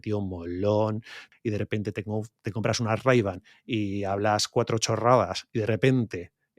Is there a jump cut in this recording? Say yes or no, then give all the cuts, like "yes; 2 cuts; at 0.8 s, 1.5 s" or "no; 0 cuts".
yes; 1 cut; at 1.3 s